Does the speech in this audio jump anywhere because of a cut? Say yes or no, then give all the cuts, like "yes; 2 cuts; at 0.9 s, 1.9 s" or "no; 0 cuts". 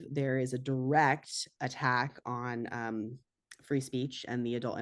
no; 0 cuts